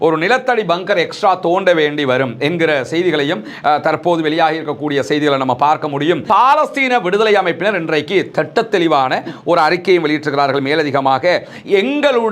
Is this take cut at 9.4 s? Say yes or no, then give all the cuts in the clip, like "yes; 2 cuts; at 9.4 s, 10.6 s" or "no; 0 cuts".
no; 1 cut; at 6.2 s